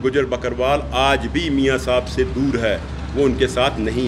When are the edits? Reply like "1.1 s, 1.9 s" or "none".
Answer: none